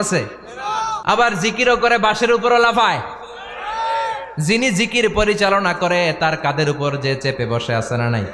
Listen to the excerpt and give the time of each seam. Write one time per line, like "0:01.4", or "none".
0:00.9